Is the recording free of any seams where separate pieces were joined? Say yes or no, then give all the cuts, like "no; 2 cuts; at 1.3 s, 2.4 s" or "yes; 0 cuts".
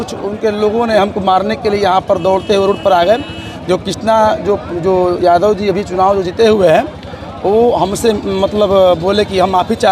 yes; 0 cuts